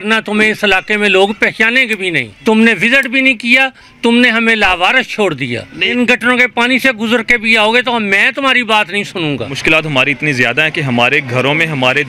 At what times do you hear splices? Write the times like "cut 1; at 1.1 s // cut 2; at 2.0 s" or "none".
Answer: cut 1; at 2.3 s // cut 2; at 5.8 s // cut 3; at 9.5 s